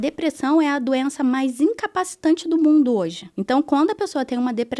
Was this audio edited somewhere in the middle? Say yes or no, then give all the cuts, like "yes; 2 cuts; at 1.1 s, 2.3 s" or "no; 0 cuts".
yes; 1 cut; at 3.3 s